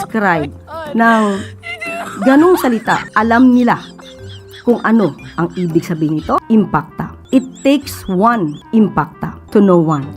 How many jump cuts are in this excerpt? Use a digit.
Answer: 3